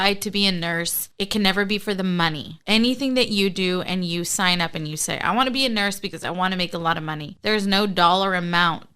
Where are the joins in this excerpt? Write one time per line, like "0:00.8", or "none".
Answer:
0:01.0
0:07.3